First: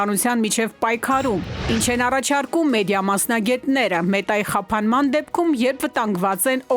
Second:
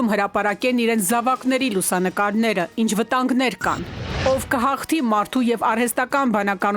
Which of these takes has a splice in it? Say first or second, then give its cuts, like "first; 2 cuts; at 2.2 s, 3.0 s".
second; 1 cut; at 4.1 s